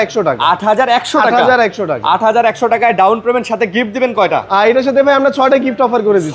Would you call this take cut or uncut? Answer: uncut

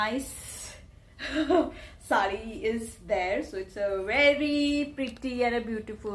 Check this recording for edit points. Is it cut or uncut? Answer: uncut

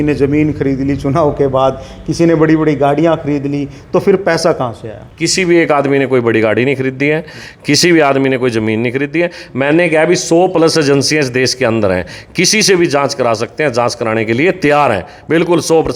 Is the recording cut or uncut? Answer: uncut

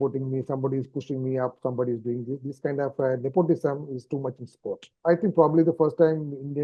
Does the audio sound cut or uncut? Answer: cut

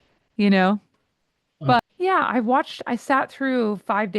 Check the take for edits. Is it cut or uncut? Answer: cut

